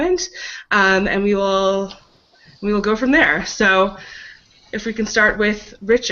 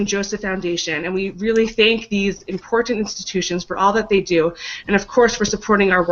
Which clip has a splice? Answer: first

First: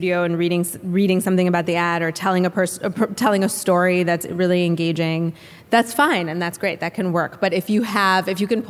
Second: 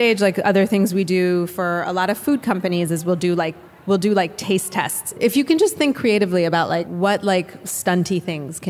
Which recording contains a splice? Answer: second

